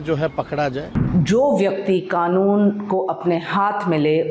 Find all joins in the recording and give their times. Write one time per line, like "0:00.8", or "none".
0:00.9